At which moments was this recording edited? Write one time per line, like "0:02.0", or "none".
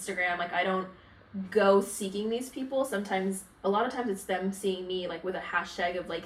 none